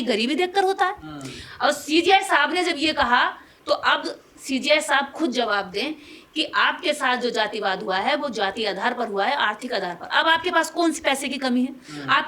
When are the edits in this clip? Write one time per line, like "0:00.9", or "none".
none